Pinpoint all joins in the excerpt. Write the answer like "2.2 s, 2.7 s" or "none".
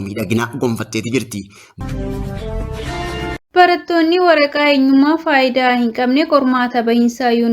1.6 s, 3.5 s